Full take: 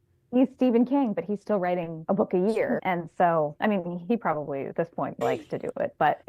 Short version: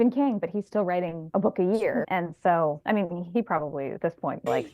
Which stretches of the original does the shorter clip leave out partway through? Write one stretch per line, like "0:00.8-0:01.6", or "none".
none